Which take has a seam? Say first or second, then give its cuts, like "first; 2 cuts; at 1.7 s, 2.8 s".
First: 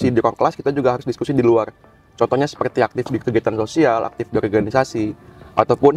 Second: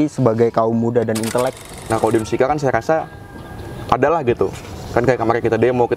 second; 1 cut; at 1.8 s